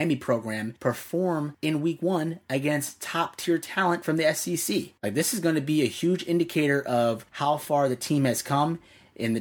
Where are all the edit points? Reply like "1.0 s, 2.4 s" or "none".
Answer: 4.9 s, 7.3 s